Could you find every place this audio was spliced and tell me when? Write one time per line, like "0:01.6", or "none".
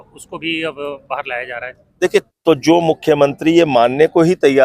0:02.3